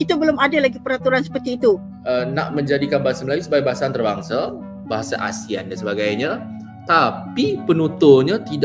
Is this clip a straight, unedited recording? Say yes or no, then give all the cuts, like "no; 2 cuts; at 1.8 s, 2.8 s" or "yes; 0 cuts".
no; 1 cut; at 1.9 s